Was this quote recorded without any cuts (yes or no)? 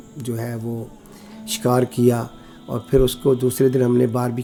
yes